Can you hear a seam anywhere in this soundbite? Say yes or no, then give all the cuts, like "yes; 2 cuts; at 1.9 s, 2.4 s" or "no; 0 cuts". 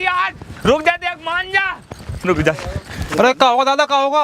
yes; 1 cut; at 3.0 s